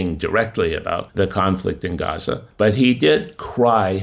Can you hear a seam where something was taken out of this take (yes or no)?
yes